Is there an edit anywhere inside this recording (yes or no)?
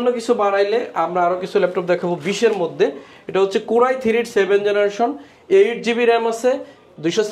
no